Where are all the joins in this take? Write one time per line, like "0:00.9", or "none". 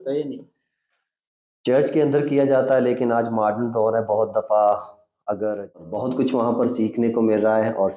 0:05.8